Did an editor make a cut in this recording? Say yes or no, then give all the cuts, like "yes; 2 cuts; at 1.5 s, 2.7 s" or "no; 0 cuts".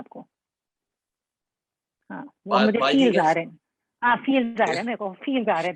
no; 0 cuts